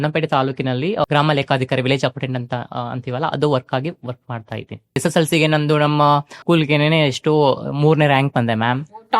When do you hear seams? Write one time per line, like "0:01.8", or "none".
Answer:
0:01.1
0:05.0
0:06.4